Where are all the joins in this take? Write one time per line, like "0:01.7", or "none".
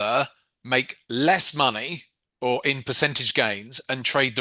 none